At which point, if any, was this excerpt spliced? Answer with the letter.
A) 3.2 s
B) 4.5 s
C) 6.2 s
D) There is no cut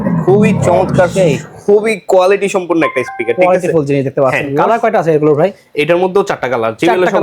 B